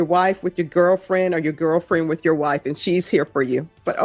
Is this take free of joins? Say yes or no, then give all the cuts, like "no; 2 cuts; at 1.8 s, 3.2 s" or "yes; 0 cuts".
yes; 0 cuts